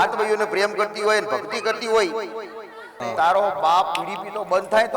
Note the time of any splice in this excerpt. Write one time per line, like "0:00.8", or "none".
0:03.1